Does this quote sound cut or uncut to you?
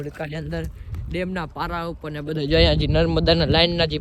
uncut